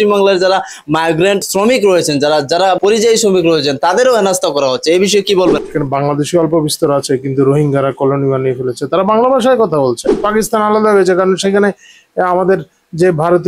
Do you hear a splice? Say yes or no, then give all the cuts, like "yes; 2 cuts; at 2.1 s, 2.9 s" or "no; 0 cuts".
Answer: yes; 4 cuts; at 1.4 s, 2.8 s, 5.6 s, 10.2 s